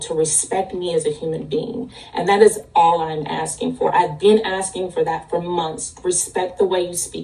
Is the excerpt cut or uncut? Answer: uncut